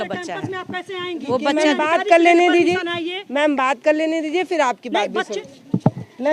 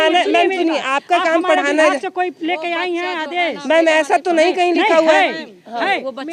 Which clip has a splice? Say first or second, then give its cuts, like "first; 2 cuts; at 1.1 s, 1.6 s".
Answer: first; 1 cut; at 5.3 s